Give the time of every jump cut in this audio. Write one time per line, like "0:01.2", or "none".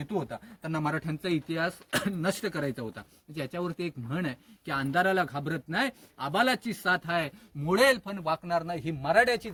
none